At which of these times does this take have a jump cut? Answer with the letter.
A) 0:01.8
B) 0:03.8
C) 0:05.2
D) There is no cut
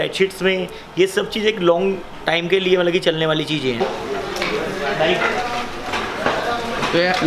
B